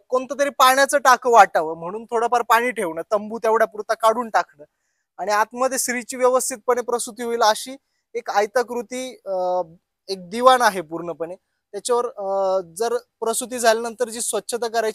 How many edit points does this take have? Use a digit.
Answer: 0